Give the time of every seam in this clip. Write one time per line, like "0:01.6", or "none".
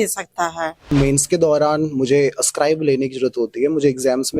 0:00.9